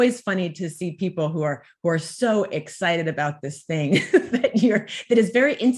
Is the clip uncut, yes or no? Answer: yes